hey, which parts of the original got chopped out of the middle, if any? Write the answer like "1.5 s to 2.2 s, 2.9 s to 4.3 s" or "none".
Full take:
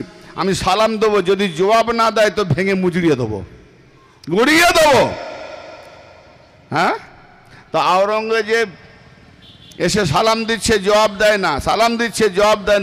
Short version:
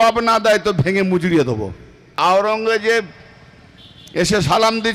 3.9 s to 7.8 s